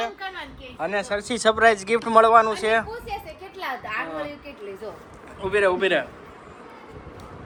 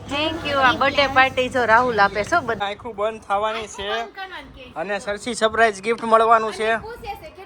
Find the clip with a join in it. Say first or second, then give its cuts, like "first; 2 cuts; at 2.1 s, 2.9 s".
second; 1 cut; at 2.6 s